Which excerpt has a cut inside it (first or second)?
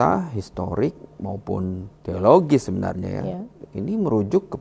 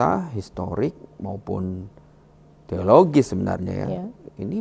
first